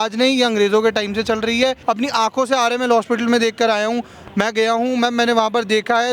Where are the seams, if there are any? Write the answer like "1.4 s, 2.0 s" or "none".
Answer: 1.8 s